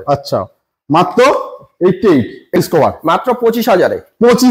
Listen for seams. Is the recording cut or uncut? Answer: cut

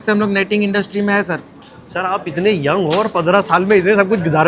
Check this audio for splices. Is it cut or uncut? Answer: uncut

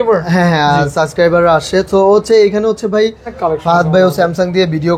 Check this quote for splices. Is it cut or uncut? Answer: cut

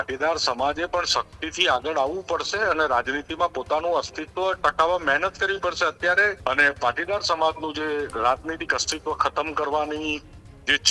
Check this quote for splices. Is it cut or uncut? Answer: cut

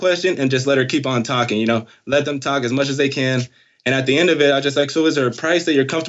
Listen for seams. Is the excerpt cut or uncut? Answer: uncut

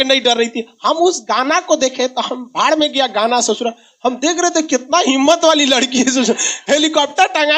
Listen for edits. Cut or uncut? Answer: uncut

